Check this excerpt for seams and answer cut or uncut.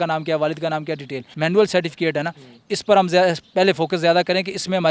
cut